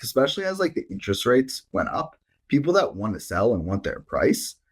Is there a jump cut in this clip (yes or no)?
no